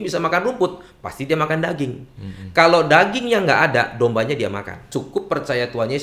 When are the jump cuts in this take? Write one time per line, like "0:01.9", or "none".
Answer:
0:04.9